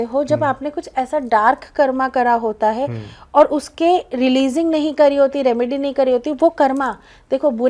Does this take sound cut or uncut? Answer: uncut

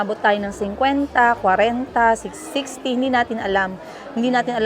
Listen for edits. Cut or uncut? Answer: uncut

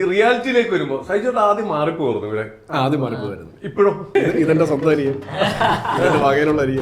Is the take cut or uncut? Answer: cut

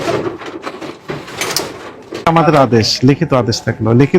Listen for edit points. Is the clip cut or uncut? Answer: cut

